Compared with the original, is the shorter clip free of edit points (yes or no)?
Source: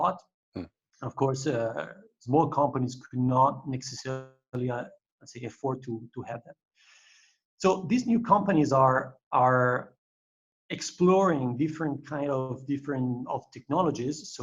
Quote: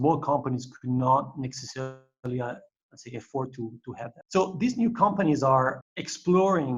no